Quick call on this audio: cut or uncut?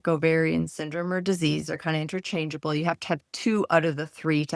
uncut